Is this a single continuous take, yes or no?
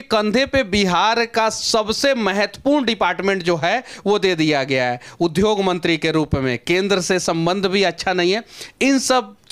yes